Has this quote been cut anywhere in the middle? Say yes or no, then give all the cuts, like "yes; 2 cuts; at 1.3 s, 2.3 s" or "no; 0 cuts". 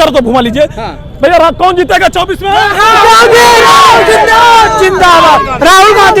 no; 0 cuts